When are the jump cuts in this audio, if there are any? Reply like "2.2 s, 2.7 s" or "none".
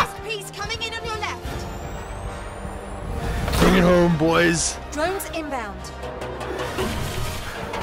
none